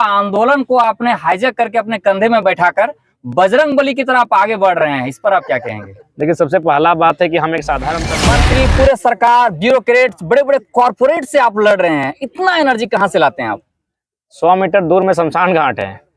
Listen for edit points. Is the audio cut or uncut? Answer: cut